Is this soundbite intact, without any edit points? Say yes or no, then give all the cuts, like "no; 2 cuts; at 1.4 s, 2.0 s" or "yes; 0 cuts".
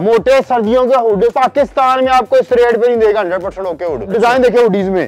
no; 2 cuts; at 1.3 s, 4.1 s